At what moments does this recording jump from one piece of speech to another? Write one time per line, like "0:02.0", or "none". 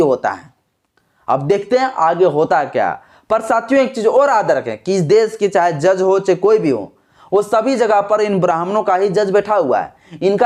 none

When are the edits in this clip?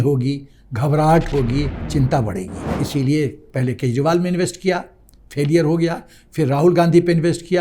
0:01.8
0:02.6

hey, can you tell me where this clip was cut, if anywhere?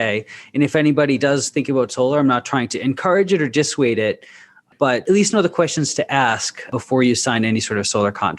0:05.0
0:06.7

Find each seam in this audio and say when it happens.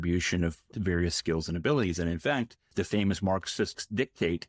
0:02.7
0:03.8

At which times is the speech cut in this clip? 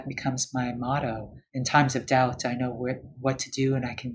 0:01.3

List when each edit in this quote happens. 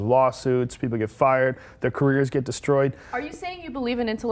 0:02.2

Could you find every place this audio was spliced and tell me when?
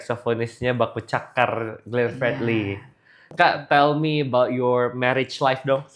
0:03.2

